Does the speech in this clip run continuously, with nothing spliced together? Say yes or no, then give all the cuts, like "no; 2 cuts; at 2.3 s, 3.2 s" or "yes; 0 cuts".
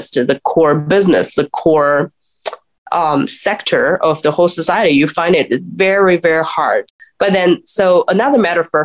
no; 1 cut; at 7.0 s